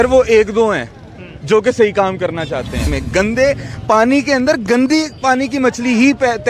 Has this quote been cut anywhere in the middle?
yes; 1 cut; at 3.0 s

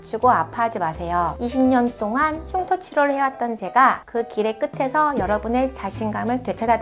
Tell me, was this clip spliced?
yes; 1 cut; at 1.4 s

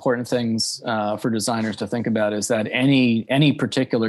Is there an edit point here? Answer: no; 0 cuts

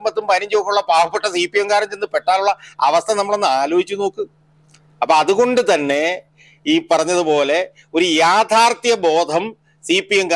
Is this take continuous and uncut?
yes; 0 cuts

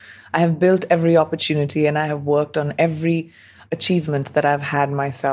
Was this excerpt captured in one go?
no; 1 cut; at 3.6 s

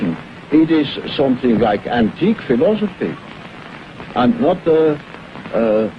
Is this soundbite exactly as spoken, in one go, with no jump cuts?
no; 1 cut; at 3.3 s

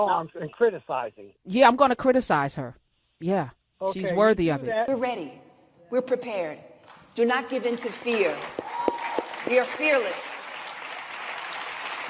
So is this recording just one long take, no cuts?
no; 1 cut; at 4.9 s

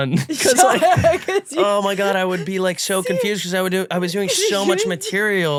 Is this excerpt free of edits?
yes; 0 cuts

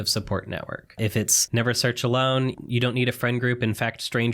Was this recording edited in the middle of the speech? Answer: yes; 2 cuts; at 1.2 s, 2.5 s

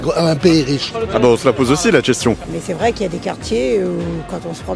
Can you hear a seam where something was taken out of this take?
yes; 1 cut; at 2.4 s

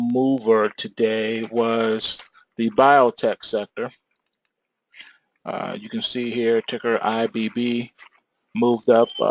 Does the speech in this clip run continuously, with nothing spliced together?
yes; 0 cuts

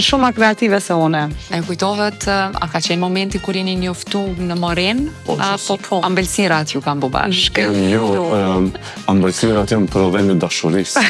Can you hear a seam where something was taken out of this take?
yes; 1 cut; at 1.4 s

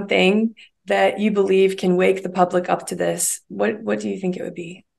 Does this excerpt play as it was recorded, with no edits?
yes; 0 cuts

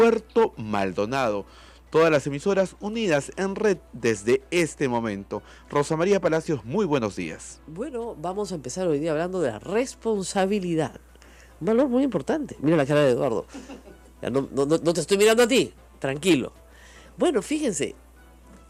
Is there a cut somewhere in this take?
no; 0 cuts

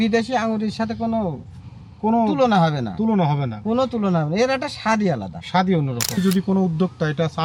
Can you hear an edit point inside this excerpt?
yes; 1 cut; at 6.2 s

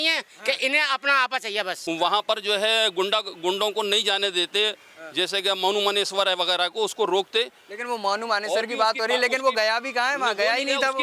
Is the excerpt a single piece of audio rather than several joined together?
no; 1 cut; at 1.8 s

